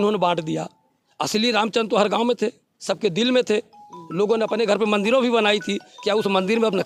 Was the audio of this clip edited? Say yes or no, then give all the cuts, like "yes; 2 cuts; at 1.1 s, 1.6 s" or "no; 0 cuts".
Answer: no; 0 cuts